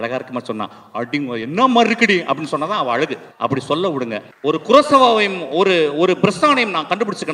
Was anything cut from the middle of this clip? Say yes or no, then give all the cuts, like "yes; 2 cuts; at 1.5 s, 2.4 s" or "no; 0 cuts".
yes; 2 cuts; at 3.2 s, 4.3 s